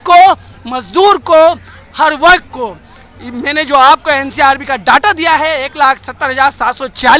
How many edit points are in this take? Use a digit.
0